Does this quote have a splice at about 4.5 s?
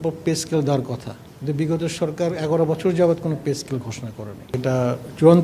yes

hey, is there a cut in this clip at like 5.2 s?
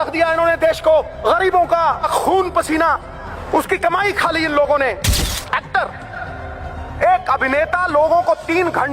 yes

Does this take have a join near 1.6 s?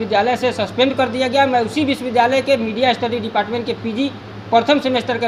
no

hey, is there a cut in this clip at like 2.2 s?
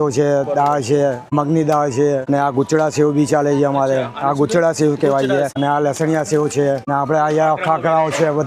yes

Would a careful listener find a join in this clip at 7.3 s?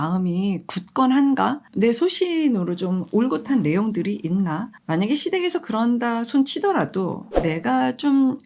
yes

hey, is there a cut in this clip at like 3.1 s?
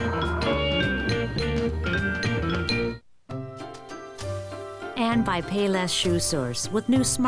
yes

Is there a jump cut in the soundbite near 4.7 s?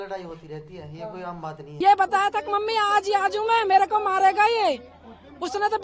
no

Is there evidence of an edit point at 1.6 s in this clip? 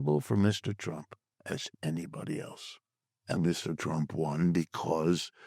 no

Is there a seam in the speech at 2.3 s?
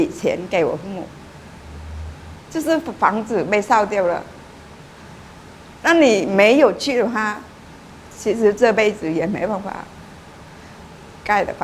yes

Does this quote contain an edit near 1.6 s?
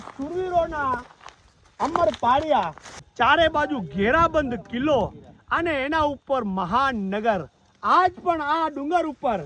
no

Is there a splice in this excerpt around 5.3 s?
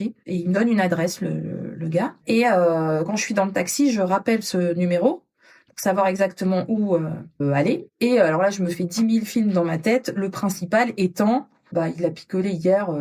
no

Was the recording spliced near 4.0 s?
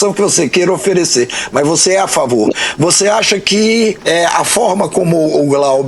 yes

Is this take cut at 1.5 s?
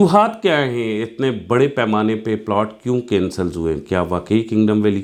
no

